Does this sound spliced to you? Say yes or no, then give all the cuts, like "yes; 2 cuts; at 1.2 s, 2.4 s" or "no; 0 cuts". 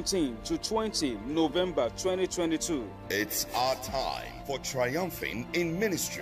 no; 0 cuts